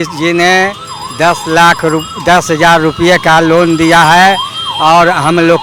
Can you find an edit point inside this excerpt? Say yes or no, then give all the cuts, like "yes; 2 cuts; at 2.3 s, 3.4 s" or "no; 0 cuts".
no; 0 cuts